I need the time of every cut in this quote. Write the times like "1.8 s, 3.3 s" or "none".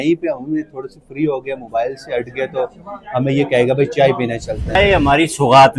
4.8 s